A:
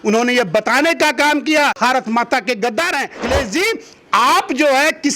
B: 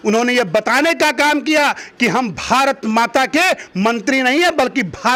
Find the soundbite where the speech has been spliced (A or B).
A